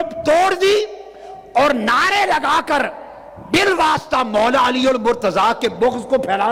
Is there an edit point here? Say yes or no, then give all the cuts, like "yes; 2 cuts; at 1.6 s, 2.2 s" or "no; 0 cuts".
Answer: no; 0 cuts